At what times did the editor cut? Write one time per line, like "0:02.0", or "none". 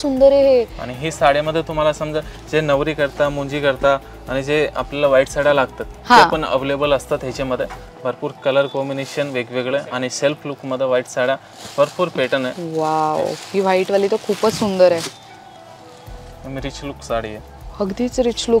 none